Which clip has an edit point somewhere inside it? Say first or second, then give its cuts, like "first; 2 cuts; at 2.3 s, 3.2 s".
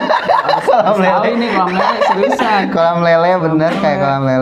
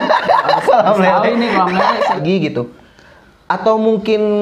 second; 1 cut; at 2.2 s